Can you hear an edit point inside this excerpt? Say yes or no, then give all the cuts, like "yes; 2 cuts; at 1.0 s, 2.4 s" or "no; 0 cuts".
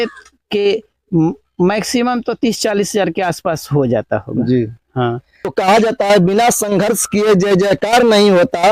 yes; 1 cut; at 5.3 s